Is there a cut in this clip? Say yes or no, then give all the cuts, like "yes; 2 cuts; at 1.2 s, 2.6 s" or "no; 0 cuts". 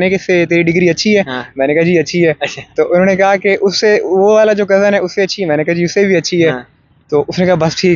no; 0 cuts